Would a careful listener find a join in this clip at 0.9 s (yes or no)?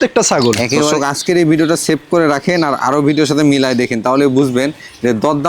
yes